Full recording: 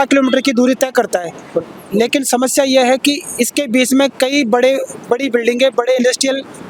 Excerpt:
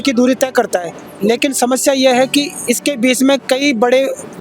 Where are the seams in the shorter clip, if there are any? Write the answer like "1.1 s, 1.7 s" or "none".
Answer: 1.0 s